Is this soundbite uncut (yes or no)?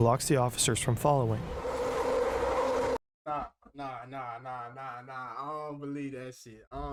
yes